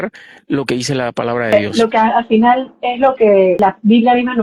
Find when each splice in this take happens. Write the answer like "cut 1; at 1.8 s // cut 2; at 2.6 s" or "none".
cut 1; at 1.5 s // cut 2; at 3.6 s